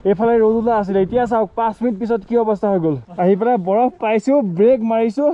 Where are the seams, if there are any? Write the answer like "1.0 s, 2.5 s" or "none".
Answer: 3.1 s